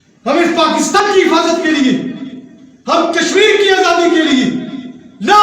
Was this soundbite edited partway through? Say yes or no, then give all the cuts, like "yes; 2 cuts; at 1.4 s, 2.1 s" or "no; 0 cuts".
yes; 1 cut; at 1.0 s